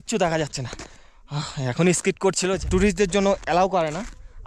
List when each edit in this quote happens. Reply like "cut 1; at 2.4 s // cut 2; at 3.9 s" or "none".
cut 1; at 2.6 s